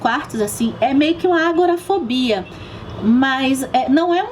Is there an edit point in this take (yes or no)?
no